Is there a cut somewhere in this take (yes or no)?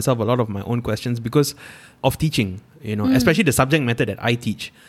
yes